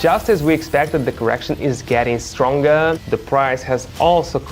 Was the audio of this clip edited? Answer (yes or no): yes